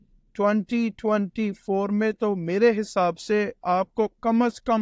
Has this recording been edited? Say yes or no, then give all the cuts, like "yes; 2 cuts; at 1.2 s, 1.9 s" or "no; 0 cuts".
no; 0 cuts